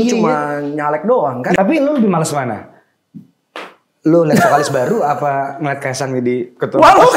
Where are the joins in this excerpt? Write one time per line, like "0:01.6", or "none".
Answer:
0:01.6